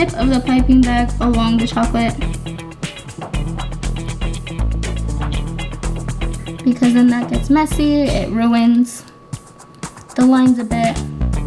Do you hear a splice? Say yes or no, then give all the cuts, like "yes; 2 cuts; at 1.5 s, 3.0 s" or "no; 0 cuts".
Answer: no; 0 cuts